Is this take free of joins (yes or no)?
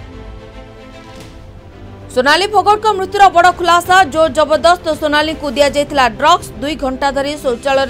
no